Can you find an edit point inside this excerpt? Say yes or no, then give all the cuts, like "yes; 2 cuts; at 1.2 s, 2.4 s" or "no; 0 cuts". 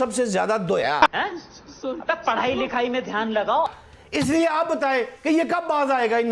no; 0 cuts